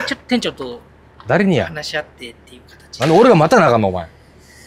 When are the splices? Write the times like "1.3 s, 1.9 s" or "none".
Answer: none